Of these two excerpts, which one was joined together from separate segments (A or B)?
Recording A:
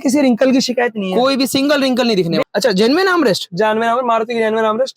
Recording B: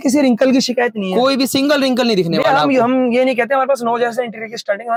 A